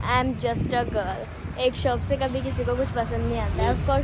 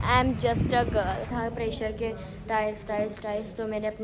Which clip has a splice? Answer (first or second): second